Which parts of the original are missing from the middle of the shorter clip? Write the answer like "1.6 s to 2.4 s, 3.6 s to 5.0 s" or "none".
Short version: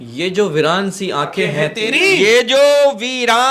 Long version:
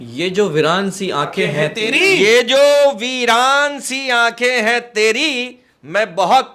none